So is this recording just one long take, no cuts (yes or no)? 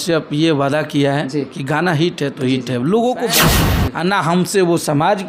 no